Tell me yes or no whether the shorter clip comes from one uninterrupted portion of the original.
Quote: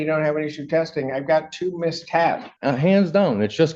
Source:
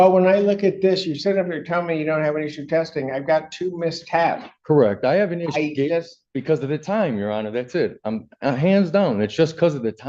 no